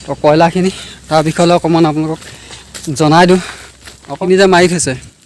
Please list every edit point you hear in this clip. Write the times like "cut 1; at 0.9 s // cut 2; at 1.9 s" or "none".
cut 1; at 4.2 s